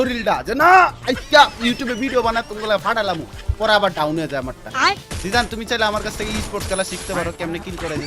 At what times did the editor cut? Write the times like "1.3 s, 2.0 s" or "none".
4.9 s